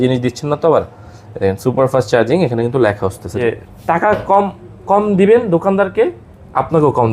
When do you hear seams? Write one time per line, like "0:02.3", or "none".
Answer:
0:03.2

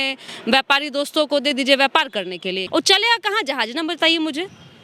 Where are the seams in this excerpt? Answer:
0:02.6

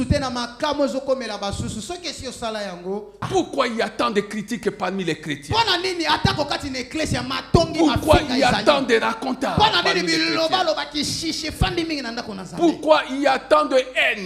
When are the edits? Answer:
0:03.3

